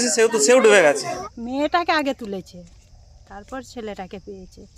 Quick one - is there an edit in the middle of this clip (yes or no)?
yes